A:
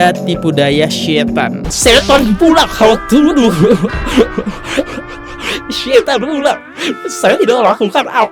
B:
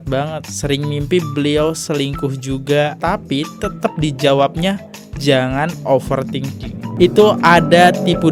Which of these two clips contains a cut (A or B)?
A